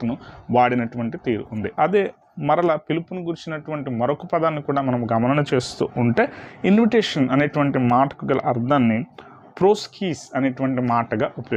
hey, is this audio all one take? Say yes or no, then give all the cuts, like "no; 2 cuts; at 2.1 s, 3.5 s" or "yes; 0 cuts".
yes; 0 cuts